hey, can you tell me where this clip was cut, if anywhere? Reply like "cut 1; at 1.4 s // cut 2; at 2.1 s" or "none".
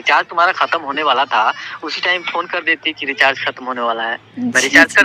none